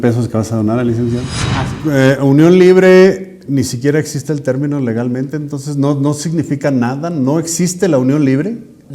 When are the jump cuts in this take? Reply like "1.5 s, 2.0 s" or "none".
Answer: 1.4 s